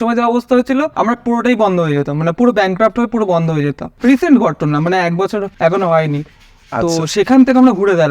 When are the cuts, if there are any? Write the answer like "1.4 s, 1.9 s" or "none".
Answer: 0.9 s, 3.8 s, 5.5 s